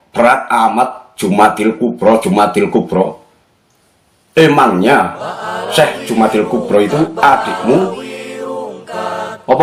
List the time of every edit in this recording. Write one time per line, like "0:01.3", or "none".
none